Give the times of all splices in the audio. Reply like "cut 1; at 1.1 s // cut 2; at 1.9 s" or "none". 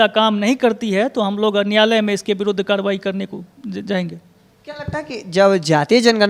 none